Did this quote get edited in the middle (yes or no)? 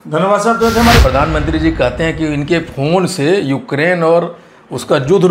yes